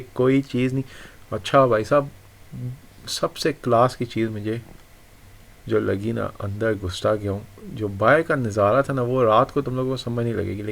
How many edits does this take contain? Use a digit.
0